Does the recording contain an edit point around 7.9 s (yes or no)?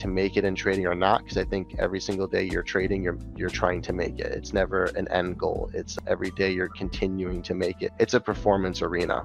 yes